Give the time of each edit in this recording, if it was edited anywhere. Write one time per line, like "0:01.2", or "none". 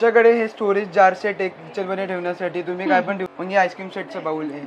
0:03.6